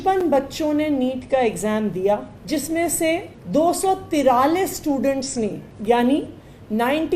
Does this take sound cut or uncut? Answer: cut